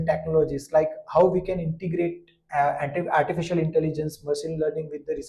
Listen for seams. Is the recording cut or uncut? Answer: uncut